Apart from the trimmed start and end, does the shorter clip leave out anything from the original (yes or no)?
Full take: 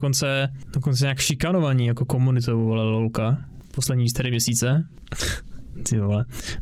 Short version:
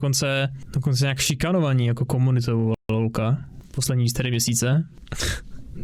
no